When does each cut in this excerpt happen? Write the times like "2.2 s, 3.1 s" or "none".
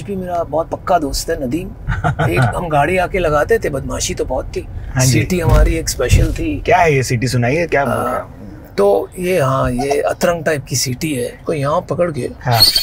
1.8 s, 6.6 s, 11.4 s